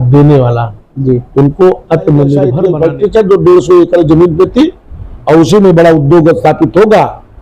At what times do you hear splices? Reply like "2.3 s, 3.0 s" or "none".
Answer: 2.6 s